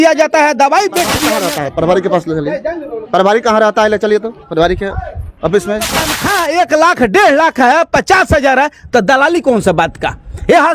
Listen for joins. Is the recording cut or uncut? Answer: cut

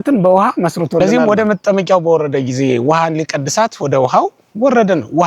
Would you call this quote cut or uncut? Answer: cut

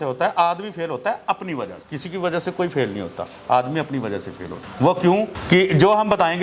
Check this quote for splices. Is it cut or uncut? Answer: uncut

